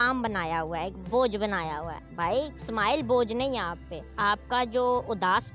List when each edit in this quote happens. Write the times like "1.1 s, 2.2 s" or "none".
none